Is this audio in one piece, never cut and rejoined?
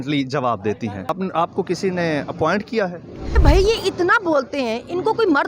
no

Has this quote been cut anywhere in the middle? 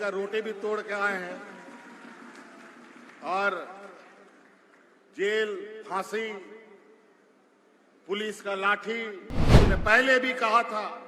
yes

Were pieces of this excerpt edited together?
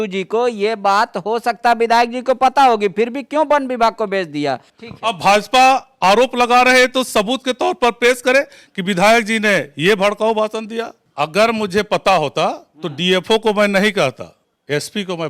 yes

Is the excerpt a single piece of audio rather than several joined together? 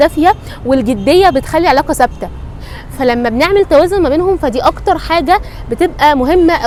yes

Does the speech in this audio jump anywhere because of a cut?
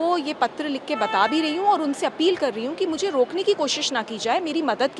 no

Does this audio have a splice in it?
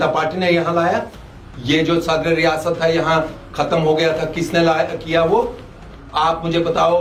no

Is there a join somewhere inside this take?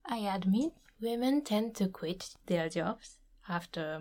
yes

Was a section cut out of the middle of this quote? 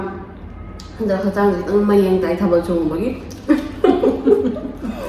no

